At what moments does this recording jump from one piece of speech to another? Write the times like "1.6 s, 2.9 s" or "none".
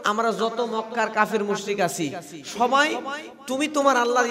none